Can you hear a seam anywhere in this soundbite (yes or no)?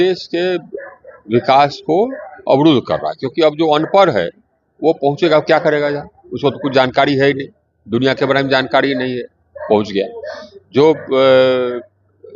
no